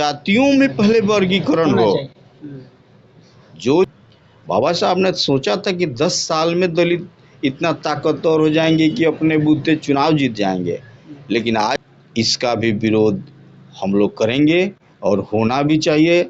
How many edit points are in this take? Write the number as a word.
two